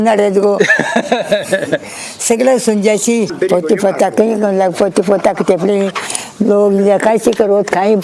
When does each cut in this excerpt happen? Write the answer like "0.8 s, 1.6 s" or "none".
3.3 s